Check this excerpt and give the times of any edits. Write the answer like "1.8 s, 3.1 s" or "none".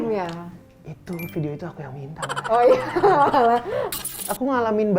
4.0 s